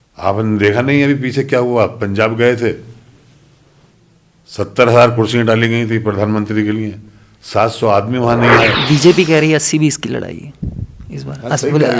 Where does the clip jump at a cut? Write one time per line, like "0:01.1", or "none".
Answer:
0:08.8